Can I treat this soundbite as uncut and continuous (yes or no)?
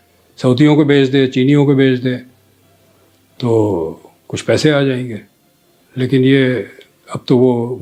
yes